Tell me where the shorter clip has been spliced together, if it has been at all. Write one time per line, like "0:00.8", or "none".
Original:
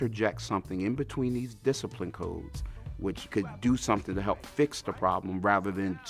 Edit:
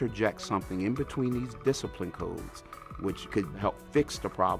0:03.6